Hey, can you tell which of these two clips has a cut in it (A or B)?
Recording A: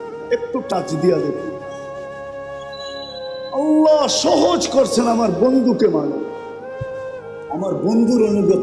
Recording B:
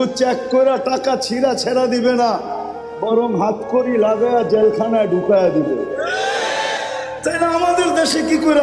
A